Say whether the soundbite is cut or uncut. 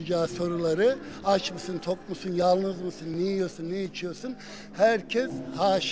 uncut